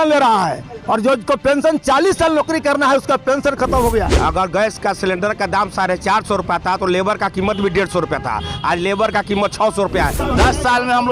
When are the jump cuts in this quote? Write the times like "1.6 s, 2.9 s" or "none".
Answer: 4.1 s, 10.2 s